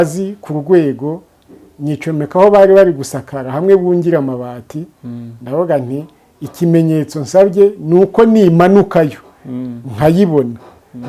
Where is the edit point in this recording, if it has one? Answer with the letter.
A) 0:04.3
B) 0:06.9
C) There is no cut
C